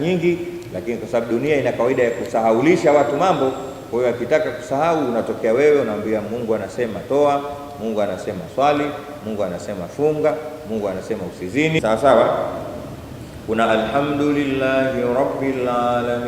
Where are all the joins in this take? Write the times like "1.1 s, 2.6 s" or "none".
11.8 s

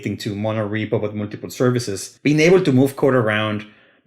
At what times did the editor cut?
2.0 s

